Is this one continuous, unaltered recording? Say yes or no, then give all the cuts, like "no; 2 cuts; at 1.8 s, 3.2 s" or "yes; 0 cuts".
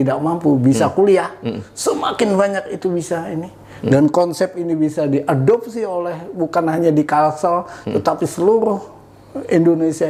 yes; 0 cuts